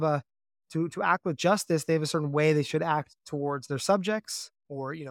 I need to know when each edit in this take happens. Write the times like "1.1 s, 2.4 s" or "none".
3.1 s